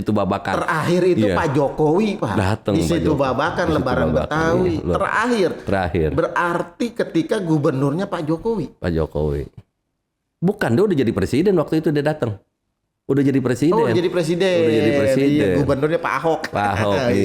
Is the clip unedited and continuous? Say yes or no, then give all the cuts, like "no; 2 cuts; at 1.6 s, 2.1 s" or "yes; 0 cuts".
yes; 0 cuts